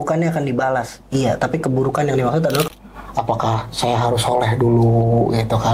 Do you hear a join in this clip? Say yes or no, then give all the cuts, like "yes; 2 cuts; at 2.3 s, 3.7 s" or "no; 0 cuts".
yes; 1 cut; at 2.7 s